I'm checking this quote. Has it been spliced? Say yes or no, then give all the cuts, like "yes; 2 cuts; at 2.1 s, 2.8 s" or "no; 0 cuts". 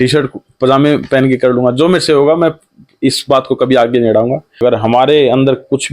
yes; 1 cut; at 4.6 s